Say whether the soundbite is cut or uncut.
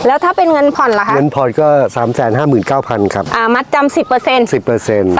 cut